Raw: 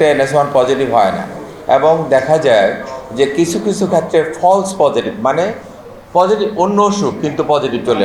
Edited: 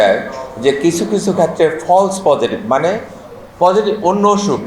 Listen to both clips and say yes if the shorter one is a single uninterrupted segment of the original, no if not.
yes